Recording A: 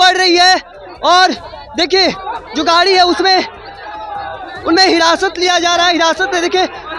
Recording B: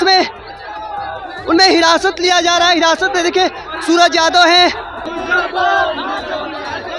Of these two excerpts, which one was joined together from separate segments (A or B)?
B